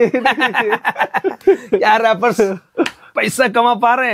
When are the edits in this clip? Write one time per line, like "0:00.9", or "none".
none